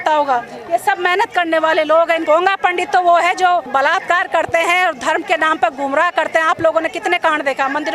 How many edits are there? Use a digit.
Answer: 2